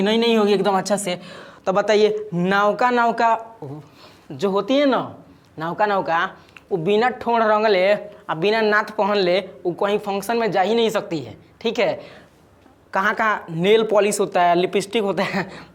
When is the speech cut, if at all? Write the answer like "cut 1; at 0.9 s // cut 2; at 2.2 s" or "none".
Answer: none

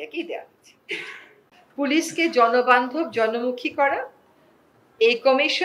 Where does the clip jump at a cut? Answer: cut 1; at 1.3 s

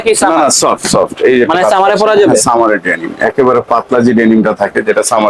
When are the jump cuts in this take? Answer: none

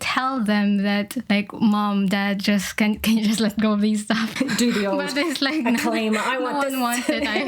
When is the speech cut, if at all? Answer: cut 1; at 1.2 s // cut 2; at 4.3 s

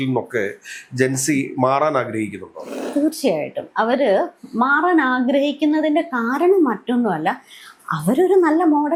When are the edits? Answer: none

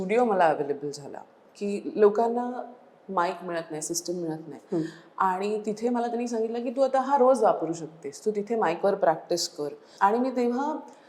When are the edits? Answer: cut 1; at 9.8 s

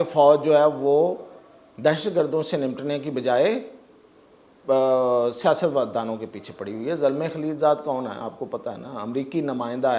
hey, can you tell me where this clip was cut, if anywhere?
none

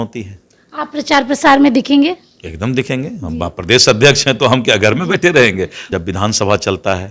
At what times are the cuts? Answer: cut 1; at 5.8 s

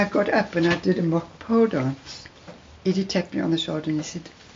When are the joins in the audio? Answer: cut 1; at 2.5 s

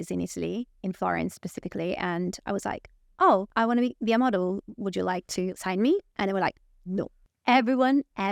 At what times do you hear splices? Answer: cut 1; at 3.5 s // cut 2; at 5.5 s // cut 3; at 7.2 s

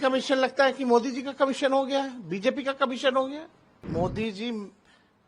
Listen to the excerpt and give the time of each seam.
cut 1; at 3.8 s

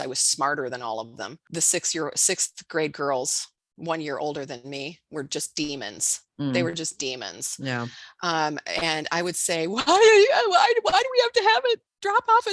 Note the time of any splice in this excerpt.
cut 1; at 1.4 s

